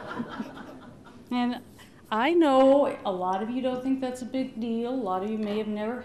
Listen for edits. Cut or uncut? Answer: uncut